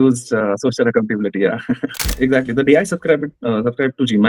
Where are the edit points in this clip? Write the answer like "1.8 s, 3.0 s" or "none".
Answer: 2.0 s